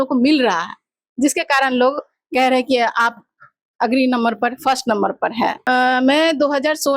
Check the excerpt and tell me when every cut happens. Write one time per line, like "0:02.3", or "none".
0:05.6

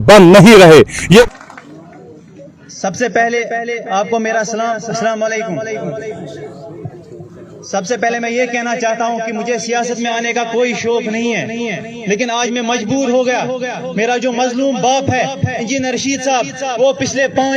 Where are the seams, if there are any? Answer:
0:01.2

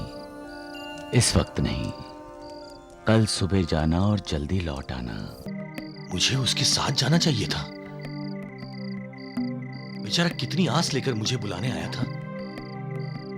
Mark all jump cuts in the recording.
0:05.5

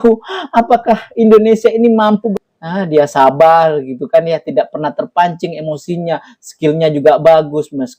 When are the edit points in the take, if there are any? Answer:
0:02.3

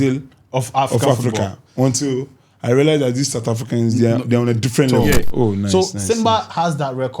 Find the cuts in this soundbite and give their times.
0:05.2

